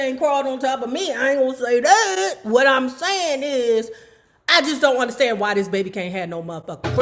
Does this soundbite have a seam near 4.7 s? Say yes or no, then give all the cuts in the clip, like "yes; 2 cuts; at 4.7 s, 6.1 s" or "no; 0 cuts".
no; 0 cuts